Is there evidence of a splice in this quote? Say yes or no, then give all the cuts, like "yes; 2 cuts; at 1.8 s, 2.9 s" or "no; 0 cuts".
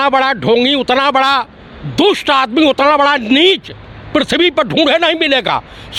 no; 0 cuts